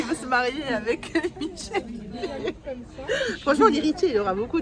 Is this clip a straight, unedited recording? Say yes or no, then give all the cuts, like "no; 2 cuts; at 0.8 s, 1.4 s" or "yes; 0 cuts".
yes; 0 cuts